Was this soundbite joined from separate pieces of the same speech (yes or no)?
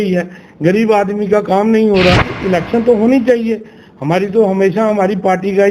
yes